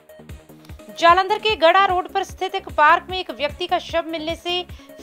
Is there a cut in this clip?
yes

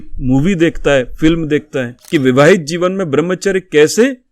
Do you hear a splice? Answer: yes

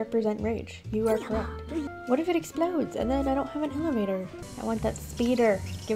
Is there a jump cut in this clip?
yes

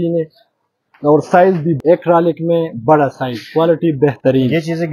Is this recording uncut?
no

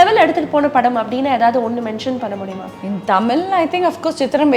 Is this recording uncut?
no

